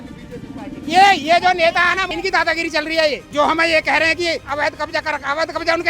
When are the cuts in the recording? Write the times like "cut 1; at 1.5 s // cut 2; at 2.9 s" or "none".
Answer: cut 1; at 2.1 s // cut 2; at 3.3 s // cut 3; at 4.5 s